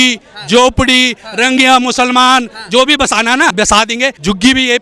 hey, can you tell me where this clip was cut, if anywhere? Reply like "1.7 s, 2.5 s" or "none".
3.7 s